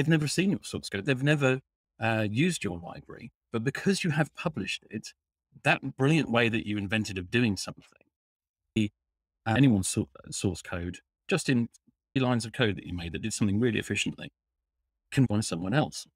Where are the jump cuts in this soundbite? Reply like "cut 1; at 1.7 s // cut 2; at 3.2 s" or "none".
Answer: cut 1; at 8.8 s // cut 2; at 12.2 s // cut 3; at 15.3 s